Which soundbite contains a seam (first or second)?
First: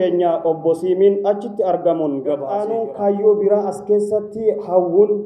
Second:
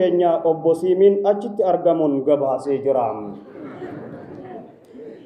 first